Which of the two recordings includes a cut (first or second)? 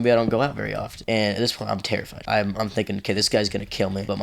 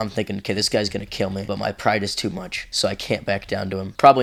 first